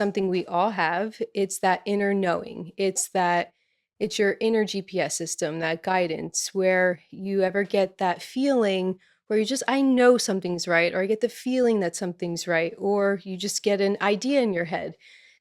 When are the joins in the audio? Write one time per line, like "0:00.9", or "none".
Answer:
none

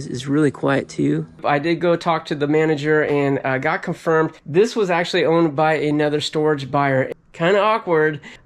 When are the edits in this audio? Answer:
0:01.4
0:07.1

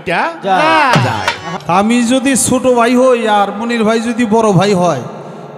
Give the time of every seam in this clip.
0:01.5

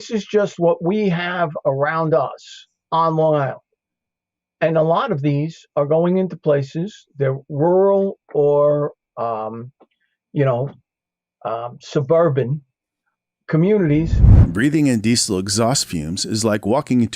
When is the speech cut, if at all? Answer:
0:14.1

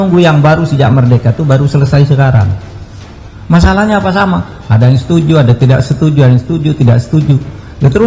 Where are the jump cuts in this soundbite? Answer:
none

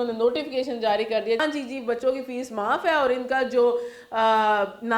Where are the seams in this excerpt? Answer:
0:01.4

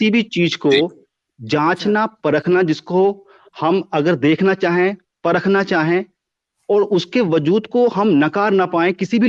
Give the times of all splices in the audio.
none

